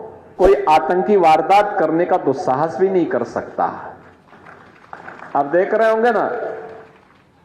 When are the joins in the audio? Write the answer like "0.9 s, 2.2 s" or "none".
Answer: none